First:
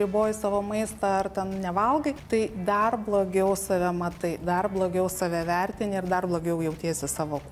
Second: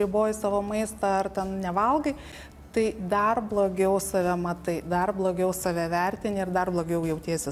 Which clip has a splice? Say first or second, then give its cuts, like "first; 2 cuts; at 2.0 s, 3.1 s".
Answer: first; 1 cut; at 2.2 s